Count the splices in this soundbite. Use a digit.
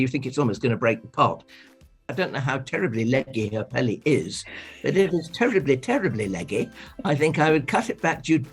1